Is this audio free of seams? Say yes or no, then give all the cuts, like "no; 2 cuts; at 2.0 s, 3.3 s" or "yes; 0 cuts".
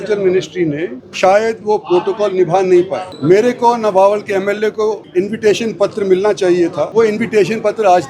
no; 4 cuts; at 1.0 s, 3.0 s, 5.0 s, 6.9 s